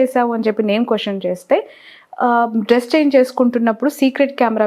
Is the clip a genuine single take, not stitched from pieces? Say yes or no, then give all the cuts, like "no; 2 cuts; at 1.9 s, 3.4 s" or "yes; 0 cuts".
yes; 0 cuts